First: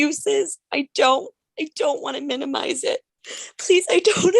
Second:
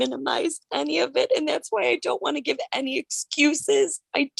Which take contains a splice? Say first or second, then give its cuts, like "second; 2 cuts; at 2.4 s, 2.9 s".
first; 1 cut; at 3.2 s